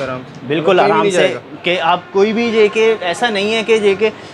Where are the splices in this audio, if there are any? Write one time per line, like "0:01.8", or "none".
none